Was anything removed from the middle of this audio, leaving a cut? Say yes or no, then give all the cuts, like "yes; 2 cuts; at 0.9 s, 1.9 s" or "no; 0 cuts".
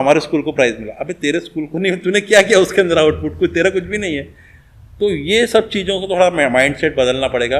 no; 0 cuts